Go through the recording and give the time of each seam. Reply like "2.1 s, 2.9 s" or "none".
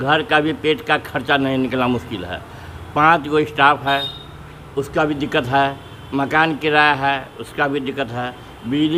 none